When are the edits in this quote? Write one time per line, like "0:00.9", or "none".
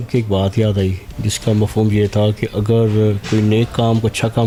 none

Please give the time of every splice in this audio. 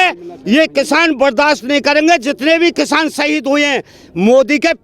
none

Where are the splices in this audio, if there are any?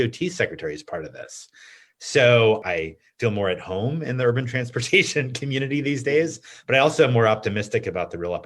0:02.6

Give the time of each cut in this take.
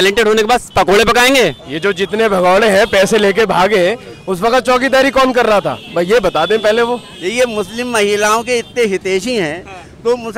0:01.7
0:07.1

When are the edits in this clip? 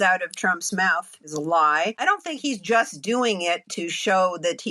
0:01.3
0:02.0

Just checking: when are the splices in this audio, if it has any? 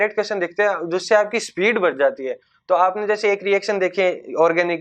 none

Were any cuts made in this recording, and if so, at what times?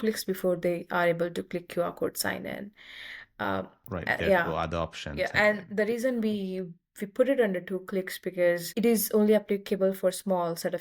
0:08.7

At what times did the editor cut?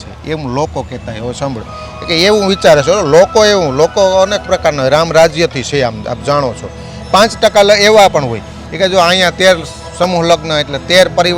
none

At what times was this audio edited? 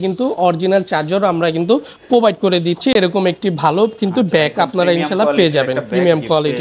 none

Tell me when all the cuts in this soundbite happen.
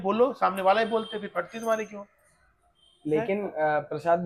none

